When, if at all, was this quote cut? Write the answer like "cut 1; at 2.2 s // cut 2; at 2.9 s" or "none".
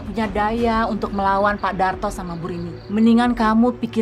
cut 1; at 2.7 s